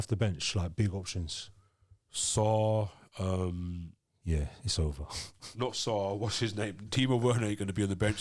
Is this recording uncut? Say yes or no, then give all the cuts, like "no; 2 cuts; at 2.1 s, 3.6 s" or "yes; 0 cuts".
yes; 0 cuts